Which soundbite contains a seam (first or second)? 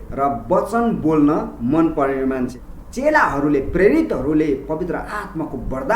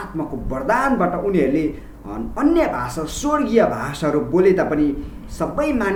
first